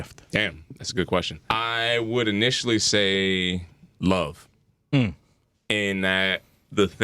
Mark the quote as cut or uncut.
cut